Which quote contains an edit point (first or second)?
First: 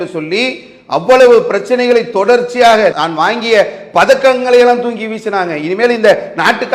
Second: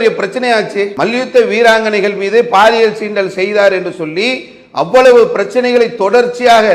second